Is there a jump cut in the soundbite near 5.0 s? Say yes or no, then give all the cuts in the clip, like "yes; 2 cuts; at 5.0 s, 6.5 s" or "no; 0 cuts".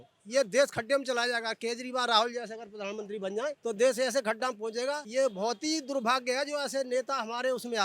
yes; 2 cuts; at 3.6 s, 5.0 s